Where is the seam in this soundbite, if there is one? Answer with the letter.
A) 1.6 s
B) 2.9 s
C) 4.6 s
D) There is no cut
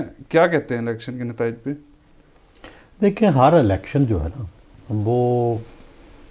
D